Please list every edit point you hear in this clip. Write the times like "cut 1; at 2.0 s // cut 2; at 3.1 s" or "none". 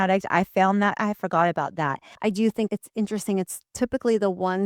cut 1; at 2.1 s // cut 2; at 2.7 s